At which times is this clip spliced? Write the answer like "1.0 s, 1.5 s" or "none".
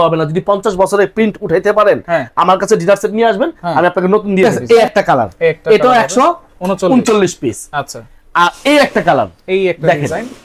4.4 s